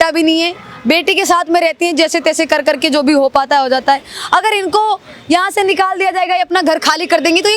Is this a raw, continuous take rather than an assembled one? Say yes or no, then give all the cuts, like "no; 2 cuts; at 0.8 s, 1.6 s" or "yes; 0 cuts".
yes; 0 cuts